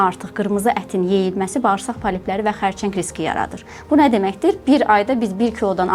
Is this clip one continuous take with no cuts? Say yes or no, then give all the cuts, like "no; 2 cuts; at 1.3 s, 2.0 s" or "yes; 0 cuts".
yes; 0 cuts